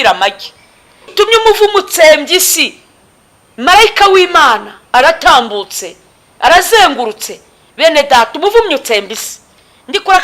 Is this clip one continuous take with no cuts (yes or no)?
no